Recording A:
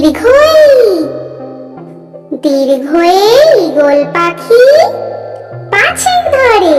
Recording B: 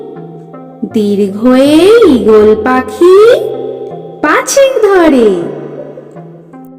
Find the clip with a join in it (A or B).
B